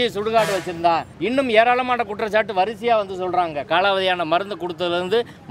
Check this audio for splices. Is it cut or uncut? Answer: cut